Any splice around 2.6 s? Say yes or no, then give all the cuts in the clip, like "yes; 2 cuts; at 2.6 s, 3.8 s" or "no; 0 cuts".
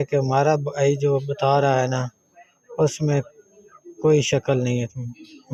no; 0 cuts